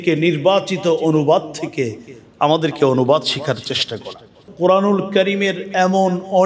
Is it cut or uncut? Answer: cut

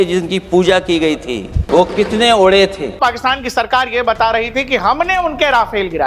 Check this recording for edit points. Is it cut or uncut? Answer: cut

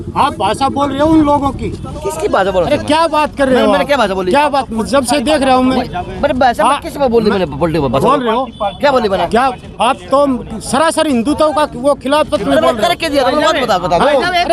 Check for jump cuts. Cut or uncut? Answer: uncut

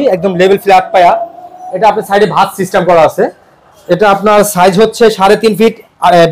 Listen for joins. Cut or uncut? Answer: uncut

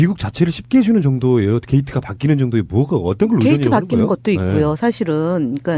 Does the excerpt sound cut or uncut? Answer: uncut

